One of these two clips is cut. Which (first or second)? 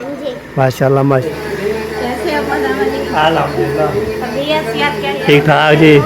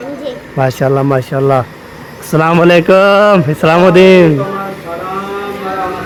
first